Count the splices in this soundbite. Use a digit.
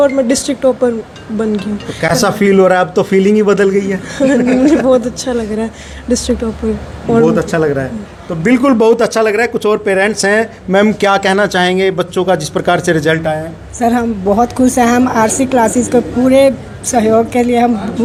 0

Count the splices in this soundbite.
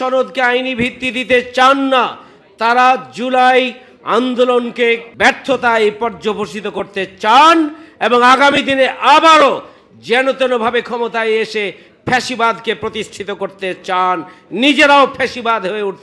1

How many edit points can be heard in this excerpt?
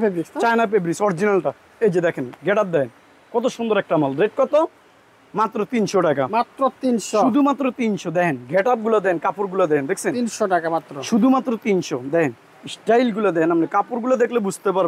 0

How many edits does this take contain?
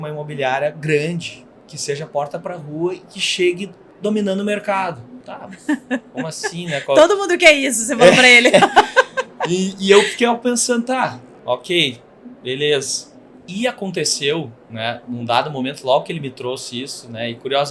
0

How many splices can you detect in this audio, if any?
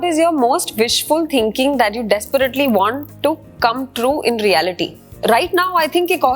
2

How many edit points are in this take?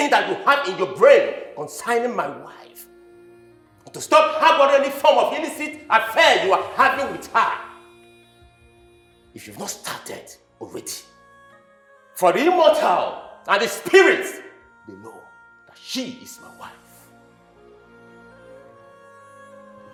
0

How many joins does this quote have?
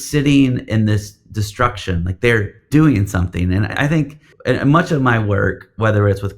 2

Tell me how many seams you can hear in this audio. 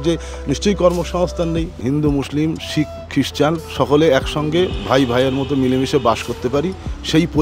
2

